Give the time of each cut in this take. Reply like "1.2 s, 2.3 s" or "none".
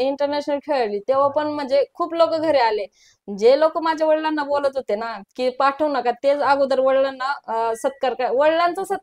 none